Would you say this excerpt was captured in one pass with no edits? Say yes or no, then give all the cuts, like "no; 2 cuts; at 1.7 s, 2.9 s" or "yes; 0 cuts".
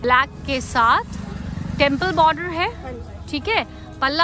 yes; 0 cuts